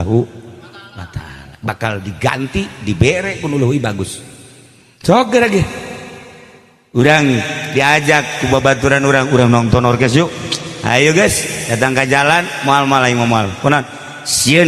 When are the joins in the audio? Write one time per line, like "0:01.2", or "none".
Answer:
none